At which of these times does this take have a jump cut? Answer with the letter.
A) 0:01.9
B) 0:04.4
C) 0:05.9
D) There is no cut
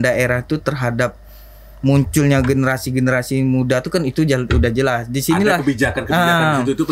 D